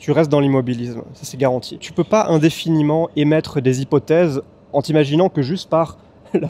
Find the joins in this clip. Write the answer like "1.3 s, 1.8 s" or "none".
1.8 s